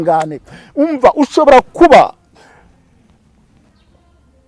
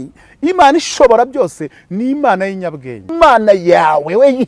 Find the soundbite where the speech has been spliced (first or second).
second